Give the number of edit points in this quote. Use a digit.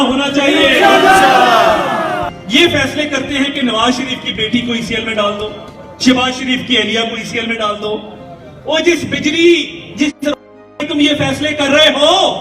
1